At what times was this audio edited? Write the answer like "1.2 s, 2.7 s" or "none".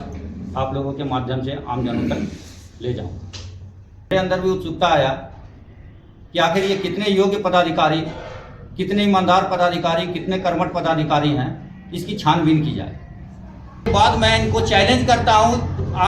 4.1 s, 13.9 s